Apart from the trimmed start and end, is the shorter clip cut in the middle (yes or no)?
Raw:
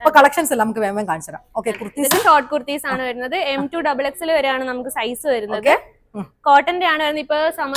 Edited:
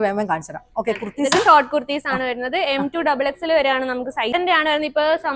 yes